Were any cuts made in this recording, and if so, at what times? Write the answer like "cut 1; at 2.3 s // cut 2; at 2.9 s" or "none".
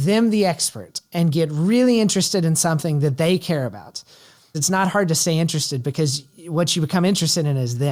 none